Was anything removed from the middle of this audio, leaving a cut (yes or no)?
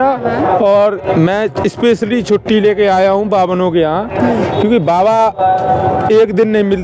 no